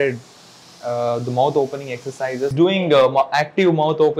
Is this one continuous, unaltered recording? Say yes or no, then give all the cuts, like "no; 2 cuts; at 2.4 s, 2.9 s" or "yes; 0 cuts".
no; 1 cut; at 2.5 s